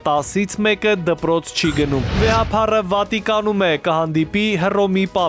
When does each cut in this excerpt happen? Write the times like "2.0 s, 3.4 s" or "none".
none